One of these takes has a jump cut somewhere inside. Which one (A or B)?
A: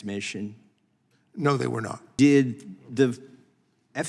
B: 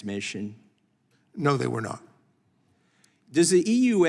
A